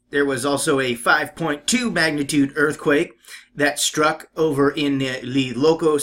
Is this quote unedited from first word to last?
no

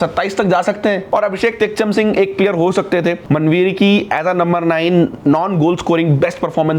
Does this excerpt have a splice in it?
yes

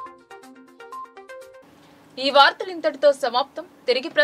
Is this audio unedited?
yes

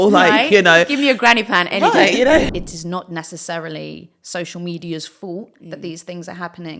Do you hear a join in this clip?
yes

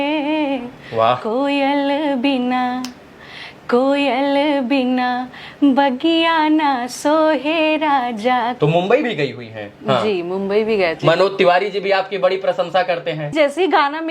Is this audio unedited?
no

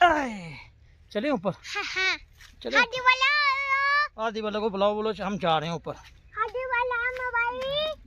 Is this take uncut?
yes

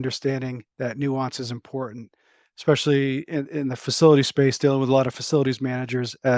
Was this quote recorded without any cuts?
yes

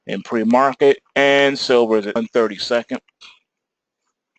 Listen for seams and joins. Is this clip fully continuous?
yes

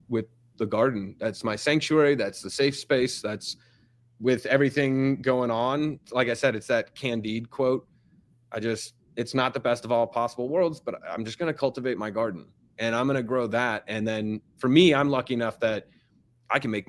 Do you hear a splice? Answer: no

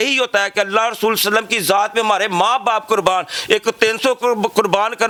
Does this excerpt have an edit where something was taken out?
no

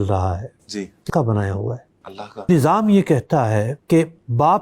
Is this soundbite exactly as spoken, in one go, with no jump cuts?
no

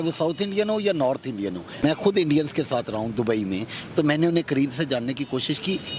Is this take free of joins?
no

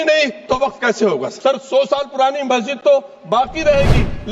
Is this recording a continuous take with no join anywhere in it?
no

